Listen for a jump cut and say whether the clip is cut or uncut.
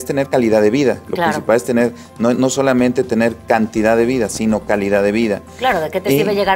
uncut